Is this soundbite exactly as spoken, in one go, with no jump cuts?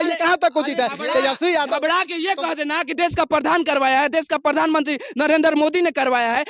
yes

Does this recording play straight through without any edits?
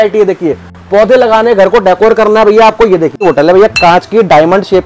no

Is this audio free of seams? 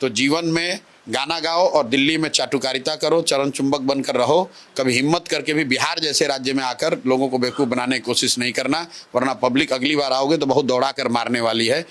yes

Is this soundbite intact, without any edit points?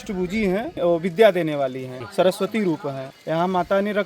no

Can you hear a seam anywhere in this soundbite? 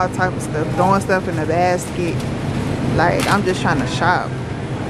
no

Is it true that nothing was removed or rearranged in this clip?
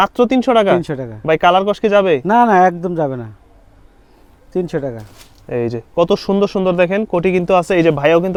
yes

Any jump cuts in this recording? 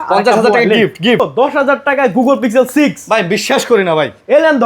yes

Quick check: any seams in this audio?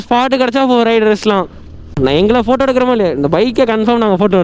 no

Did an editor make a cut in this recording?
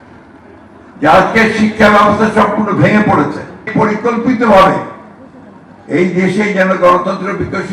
yes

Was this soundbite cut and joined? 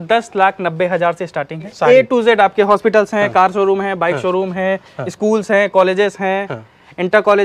yes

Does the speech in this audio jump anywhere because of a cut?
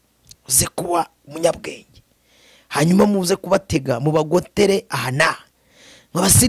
no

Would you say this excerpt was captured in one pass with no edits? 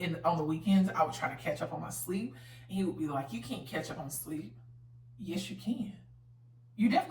yes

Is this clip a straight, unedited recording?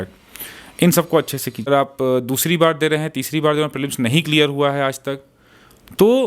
no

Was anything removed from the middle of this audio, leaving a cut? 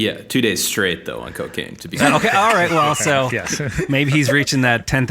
yes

